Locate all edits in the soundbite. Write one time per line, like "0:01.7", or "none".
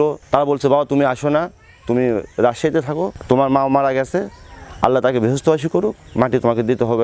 none